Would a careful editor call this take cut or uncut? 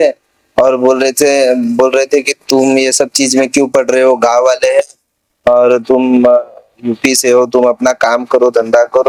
uncut